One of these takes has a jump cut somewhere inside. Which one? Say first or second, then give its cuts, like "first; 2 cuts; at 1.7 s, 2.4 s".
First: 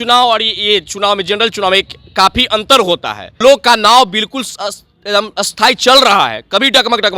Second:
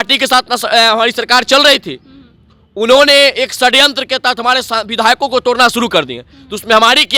first; 1 cut; at 3.4 s